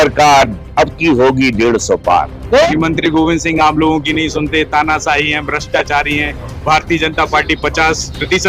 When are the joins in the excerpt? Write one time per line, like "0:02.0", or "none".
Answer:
0:02.7